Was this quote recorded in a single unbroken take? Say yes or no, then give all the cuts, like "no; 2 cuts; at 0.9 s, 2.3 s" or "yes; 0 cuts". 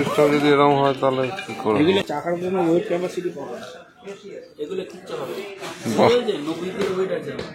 no; 1 cut; at 2.1 s